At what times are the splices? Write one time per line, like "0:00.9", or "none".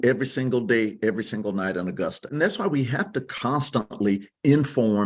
0:02.2